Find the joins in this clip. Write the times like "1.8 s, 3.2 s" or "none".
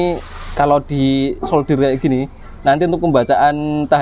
none